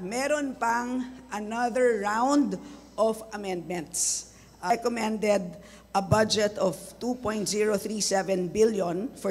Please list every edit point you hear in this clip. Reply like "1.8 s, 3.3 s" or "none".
4.7 s